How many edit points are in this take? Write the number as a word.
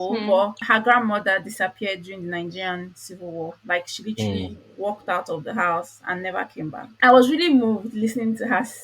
one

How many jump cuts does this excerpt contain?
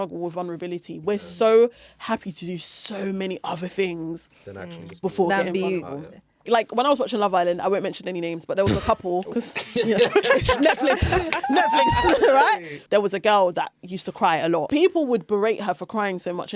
three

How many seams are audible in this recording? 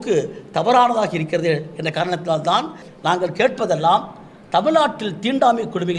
one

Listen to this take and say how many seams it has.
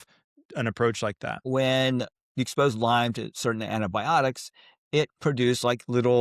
one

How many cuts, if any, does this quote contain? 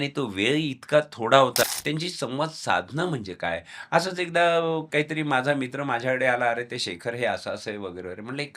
one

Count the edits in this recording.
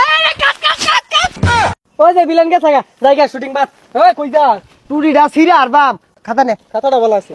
two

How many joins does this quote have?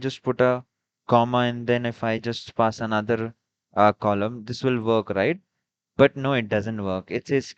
zero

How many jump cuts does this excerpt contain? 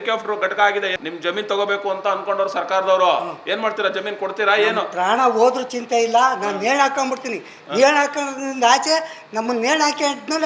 one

